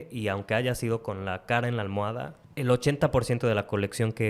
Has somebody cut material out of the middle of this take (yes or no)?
yes